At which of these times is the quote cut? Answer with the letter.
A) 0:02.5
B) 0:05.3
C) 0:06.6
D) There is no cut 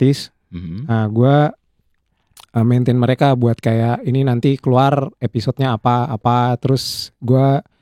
D